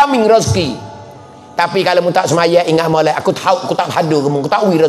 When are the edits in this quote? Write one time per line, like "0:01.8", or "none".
none